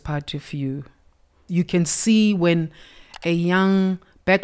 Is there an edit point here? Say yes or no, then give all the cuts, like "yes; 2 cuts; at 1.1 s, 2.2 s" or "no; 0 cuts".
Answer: yes; 1 cut; at 1.4 s